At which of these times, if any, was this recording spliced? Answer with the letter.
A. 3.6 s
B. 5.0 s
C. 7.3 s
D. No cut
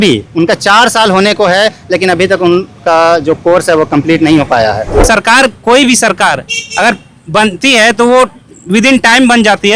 B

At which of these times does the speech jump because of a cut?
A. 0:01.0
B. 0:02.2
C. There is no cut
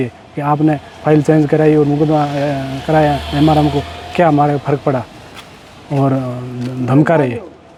C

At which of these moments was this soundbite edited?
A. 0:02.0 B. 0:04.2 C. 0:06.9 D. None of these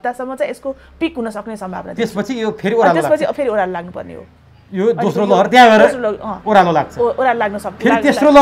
D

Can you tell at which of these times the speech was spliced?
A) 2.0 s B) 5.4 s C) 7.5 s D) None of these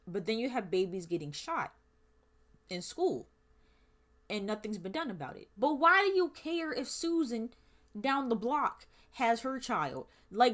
B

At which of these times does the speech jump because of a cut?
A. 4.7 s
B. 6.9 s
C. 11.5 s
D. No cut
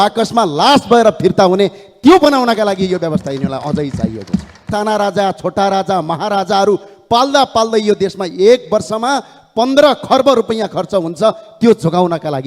A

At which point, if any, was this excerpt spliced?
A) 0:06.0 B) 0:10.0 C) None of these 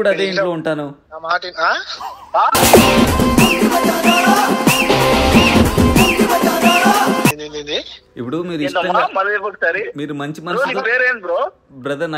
C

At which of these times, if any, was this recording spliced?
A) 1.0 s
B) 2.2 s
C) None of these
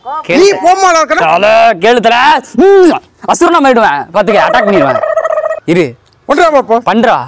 C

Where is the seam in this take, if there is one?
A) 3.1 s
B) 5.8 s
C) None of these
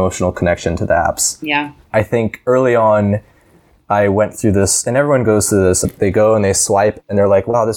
B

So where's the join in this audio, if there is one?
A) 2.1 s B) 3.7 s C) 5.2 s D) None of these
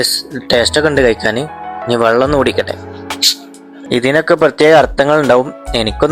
B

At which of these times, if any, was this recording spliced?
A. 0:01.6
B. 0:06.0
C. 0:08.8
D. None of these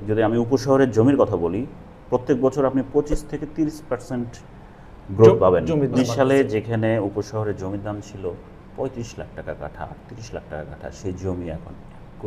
B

